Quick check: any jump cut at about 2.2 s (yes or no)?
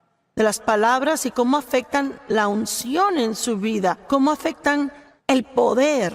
no